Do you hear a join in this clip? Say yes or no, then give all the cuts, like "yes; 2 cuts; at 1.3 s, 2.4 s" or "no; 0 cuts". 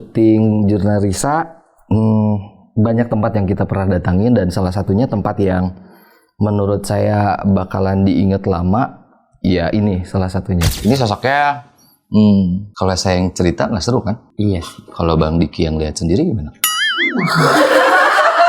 yes; 1 cut; at 10.7 s